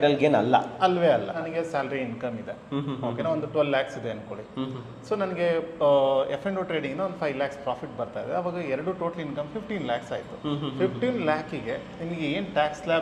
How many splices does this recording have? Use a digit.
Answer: 1